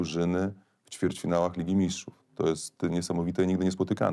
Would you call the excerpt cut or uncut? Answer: uncut